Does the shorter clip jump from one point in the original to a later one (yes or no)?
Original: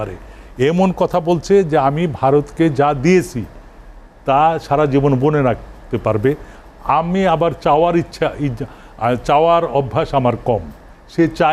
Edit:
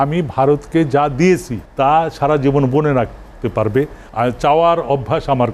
yes